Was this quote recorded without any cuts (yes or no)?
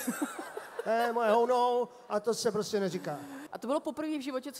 no